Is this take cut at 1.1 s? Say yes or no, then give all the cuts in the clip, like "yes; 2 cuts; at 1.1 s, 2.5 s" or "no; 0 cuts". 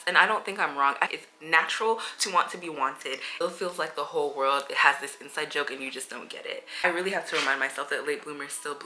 yes; 3 cuts; at 1.1 s, 3.4 s, 6.8 s